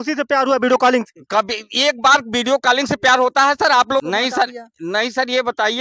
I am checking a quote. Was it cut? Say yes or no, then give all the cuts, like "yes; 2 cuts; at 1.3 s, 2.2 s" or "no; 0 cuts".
yes; 1 cut; at 4.0 s